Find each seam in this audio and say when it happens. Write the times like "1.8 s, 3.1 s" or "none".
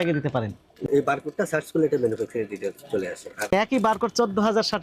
0.8 s, 3.5 s